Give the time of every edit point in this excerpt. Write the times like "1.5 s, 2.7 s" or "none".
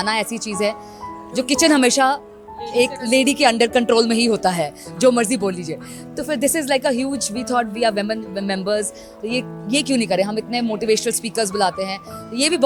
none

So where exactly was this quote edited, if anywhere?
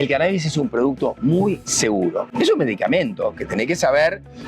2.3 s

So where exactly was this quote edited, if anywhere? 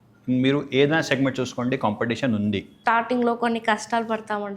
2.7 s

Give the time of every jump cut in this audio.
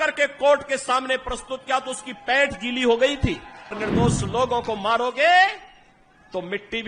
3.8 s

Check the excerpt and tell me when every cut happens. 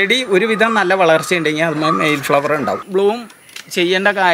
2.9 s

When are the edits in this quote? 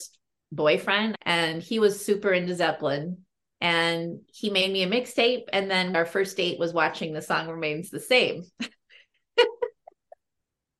1.2 s, 5.9 s

